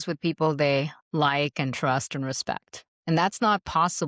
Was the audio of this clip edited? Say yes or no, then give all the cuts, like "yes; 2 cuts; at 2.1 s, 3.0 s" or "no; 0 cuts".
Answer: no; 0 cuts